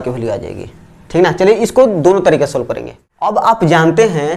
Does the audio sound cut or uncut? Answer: cut